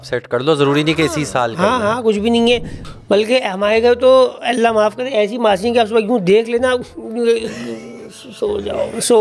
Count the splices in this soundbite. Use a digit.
1